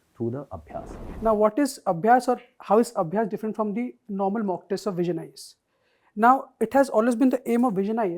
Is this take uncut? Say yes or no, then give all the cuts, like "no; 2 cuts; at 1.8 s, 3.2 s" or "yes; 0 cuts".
no; 1 cut; at 1.0 s